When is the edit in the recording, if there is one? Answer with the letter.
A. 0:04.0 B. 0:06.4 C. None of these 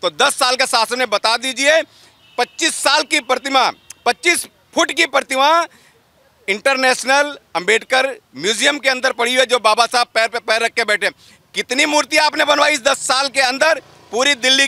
C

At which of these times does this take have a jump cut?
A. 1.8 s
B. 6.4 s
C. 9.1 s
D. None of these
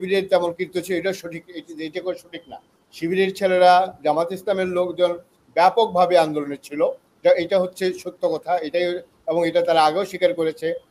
D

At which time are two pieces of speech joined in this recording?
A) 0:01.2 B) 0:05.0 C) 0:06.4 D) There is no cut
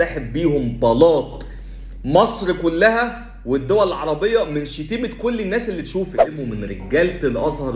C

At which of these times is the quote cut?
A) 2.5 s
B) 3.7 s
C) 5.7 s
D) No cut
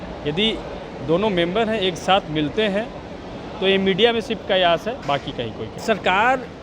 C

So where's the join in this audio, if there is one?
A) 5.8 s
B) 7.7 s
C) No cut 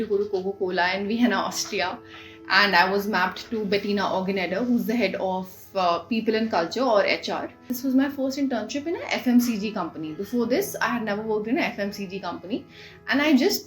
B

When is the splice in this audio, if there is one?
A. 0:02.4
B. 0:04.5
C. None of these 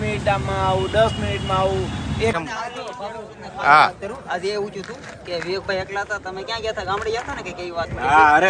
A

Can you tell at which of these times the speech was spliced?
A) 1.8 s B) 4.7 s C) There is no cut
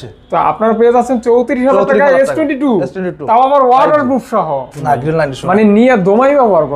B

